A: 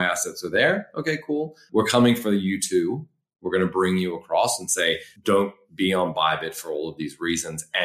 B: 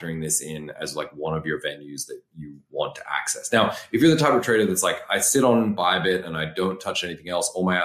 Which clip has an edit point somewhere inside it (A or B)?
A